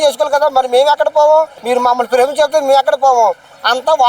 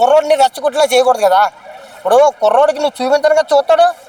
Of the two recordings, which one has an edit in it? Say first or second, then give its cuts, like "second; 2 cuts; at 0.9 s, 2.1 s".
first; 1 cut; at 1.6 s